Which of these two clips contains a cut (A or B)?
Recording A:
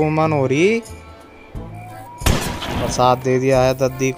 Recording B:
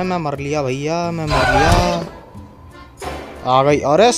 B